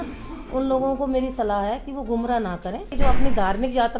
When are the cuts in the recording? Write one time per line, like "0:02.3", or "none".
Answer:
0:02.9